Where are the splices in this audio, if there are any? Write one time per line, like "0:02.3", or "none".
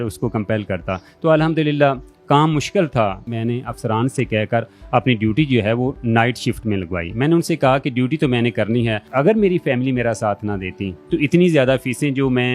0:03.3
0:09.1